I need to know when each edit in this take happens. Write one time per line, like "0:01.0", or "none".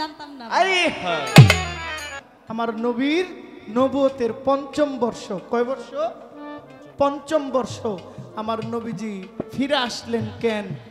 0:02.2